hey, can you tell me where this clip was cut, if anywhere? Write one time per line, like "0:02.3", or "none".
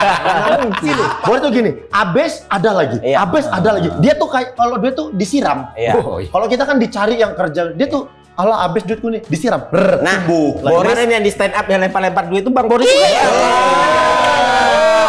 0:00.9